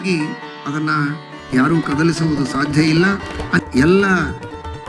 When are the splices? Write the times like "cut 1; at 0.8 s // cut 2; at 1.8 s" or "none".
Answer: cut 1; at 3.6 s